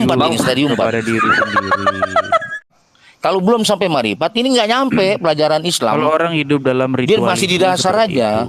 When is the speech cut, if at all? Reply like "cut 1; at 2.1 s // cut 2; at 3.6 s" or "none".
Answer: cut 1; at 2.9 s